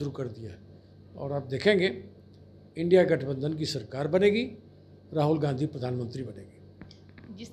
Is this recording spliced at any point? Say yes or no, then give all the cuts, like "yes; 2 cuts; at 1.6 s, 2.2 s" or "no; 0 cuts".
no; 0 cuts